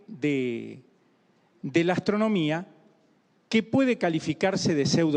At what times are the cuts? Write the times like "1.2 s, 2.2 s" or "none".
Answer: 1.5 s